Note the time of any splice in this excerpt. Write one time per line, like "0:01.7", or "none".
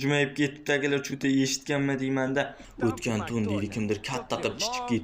0:02.6